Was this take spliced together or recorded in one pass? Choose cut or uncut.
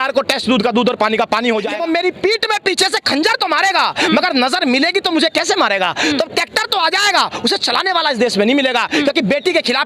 cut